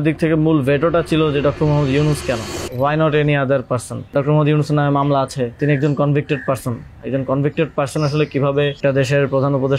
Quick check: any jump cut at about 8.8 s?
yes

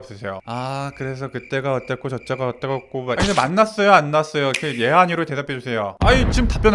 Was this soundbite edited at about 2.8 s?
no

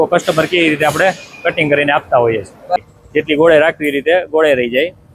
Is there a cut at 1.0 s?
no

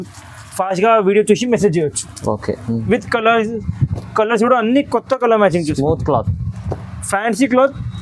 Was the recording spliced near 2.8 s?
yes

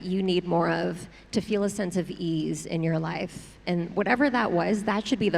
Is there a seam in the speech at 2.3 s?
no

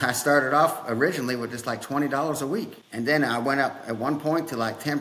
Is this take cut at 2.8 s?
no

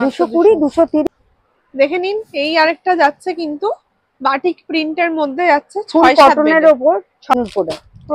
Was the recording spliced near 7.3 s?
yes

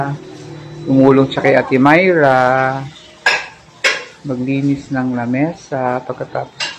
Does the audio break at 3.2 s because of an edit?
no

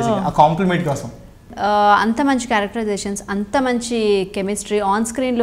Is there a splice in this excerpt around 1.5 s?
yes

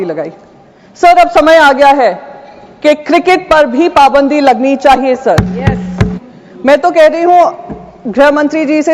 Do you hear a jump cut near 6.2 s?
yes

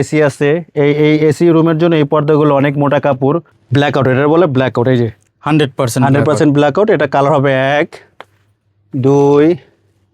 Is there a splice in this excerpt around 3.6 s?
yes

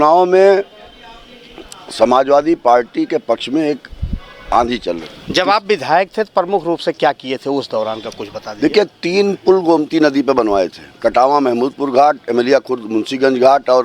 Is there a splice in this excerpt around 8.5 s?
no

